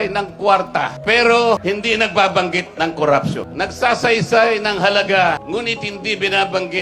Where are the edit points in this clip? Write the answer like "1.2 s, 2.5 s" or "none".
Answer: 0.9 s, 1.6 s, 3.5 s, 5.4 s